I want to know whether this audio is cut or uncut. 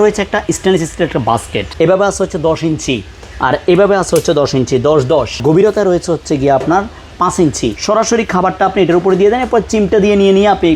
cut